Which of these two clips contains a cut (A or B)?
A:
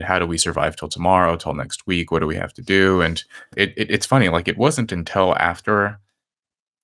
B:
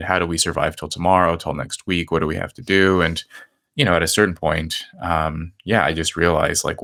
A